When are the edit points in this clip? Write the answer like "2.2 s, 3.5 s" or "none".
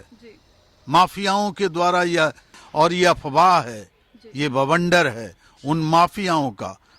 2.6 s